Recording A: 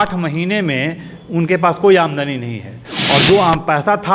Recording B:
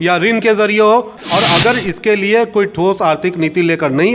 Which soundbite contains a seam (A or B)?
B